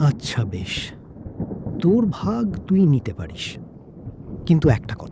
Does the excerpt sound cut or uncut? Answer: uncut